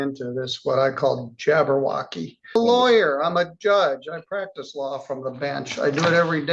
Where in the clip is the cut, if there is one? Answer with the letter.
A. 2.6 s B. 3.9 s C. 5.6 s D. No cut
A